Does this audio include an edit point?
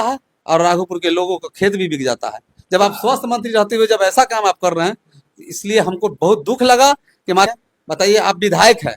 yes; 1 cut; at 7.5 s

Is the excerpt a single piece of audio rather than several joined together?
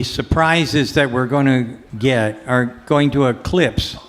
no; 1 cut; at 1.8 s

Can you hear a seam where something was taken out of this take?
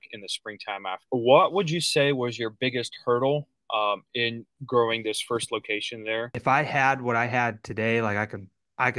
yes; 2 cuts; at 1.0 s, 6.3 s

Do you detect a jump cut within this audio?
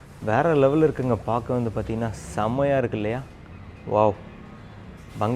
no; 0 cuts

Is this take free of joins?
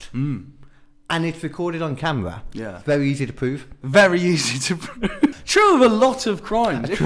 no; 1 cut; at 5.4 s

